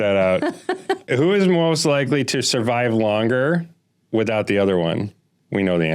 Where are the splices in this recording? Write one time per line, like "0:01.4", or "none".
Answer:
0:01.0